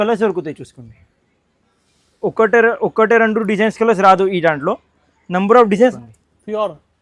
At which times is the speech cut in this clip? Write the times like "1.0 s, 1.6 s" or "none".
6.0 s